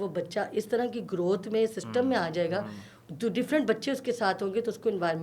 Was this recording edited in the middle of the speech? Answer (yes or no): no